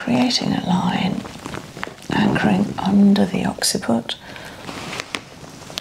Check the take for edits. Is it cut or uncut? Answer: uncut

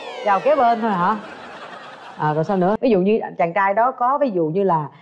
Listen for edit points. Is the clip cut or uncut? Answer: cut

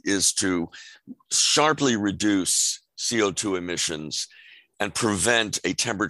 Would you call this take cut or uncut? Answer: uncut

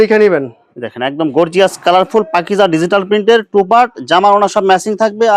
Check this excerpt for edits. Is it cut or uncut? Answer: uncut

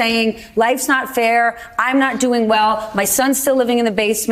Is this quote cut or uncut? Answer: uncut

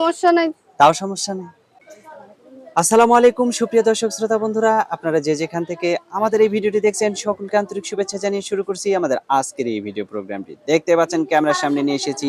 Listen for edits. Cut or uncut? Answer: uncut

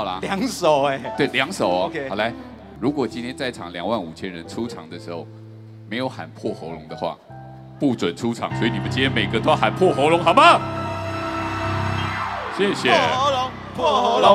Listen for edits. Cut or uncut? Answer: cut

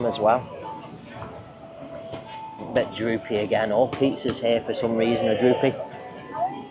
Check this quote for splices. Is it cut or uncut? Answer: uncut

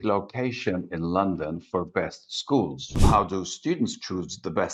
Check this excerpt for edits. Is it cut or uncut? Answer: cut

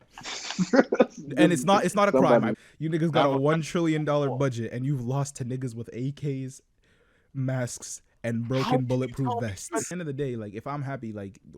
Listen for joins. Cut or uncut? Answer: cut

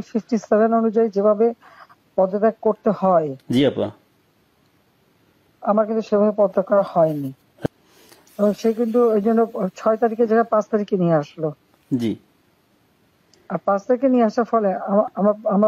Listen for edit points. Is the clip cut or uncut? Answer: cut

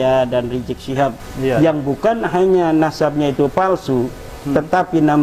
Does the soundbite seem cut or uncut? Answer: cut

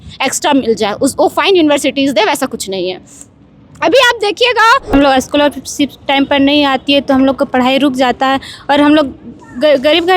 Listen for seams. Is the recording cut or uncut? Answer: cut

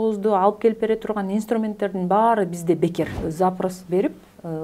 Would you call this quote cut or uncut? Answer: cut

